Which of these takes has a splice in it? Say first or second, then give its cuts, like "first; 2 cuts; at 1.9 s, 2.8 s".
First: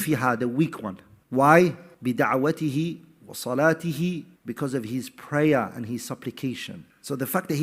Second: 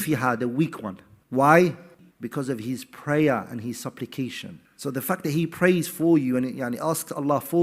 second; 1 cut; at 2.0 s